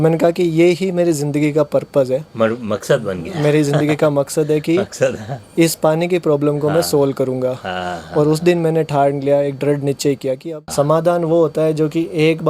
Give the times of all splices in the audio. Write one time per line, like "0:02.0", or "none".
0:10.5